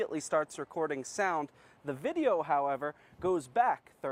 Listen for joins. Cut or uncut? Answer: uncut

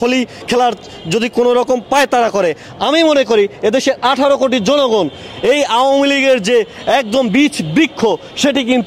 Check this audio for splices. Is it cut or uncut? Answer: uncut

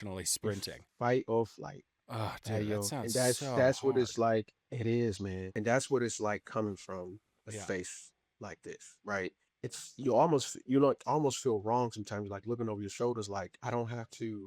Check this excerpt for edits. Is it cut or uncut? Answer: cut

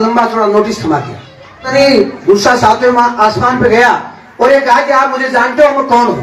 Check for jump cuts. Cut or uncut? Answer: cut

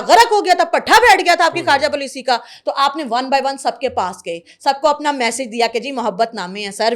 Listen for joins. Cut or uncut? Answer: uncut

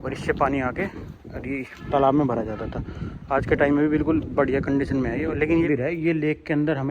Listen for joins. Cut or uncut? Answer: cut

